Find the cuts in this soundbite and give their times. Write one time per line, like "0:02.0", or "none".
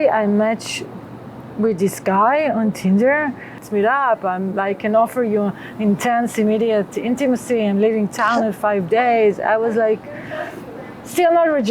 0:03.6